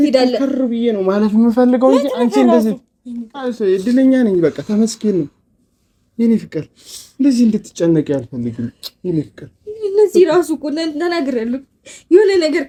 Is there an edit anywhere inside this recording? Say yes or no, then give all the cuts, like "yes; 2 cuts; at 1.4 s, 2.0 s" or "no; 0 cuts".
no; 0 cuts